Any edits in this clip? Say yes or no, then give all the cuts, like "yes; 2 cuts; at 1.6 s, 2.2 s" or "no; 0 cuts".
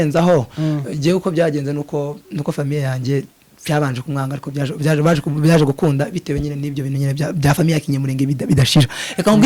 no; 0 cuts